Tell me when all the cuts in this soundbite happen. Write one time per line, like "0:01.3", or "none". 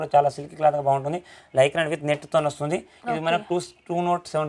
none